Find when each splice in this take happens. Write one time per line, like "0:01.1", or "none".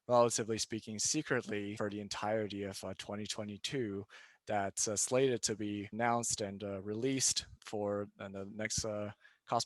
0:01.7
0:05.9
0:07.5